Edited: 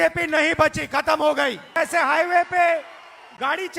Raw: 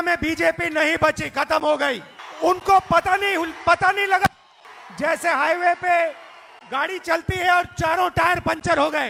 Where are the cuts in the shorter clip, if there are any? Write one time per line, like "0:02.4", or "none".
0:01.7